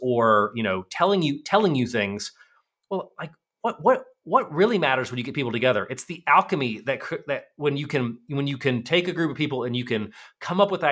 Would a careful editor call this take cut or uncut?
uncut